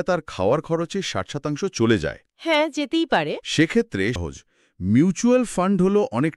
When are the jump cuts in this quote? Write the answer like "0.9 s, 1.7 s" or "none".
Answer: 4.2 s